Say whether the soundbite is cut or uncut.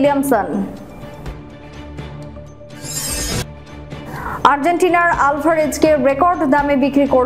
uncut